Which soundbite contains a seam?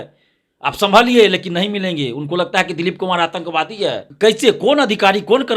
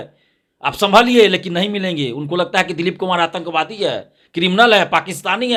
first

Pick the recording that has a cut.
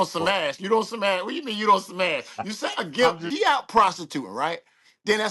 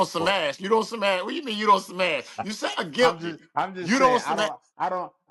first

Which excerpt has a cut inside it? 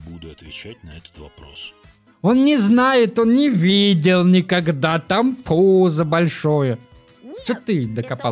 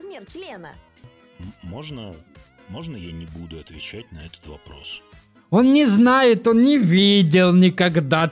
second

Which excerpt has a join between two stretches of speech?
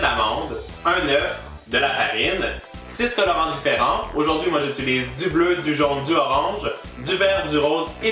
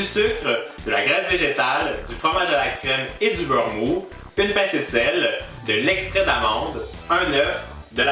second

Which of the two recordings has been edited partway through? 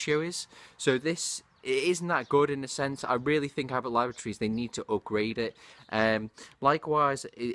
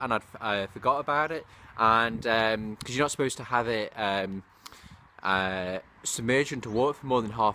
first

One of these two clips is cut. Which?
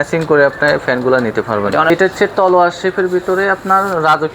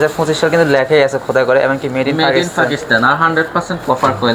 first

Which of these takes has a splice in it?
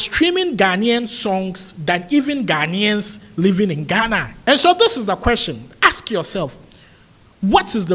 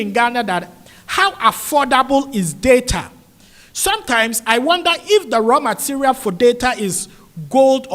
first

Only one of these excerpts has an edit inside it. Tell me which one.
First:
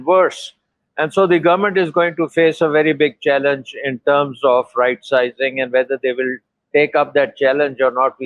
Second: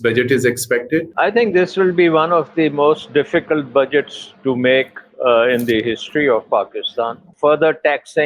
second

